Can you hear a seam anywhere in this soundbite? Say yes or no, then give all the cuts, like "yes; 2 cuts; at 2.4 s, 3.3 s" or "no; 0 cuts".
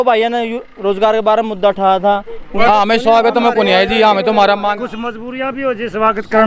yes; 1 cut; at 2.4 s